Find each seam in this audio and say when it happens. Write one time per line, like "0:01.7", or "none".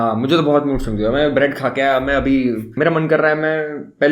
0:02.7